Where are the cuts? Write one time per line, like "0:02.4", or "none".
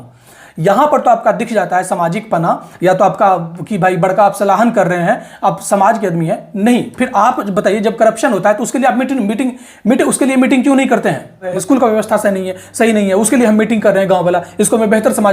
0:11.5